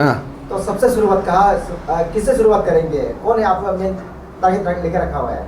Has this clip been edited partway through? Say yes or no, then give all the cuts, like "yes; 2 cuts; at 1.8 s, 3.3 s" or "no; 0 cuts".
no; 0 cuts